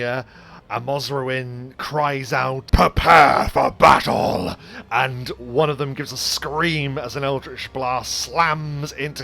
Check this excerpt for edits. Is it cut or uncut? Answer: cut